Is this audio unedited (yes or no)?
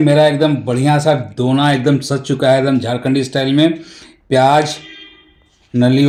yes